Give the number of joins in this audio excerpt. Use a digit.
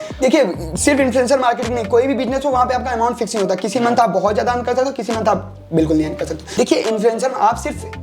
1